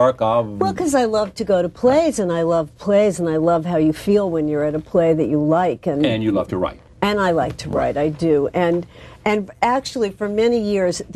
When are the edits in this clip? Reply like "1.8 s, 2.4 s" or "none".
4.5 s